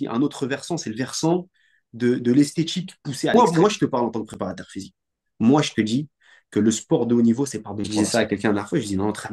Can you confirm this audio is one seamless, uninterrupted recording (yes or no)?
no